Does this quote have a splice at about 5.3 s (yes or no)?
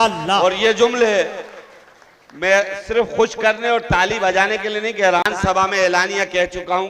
yes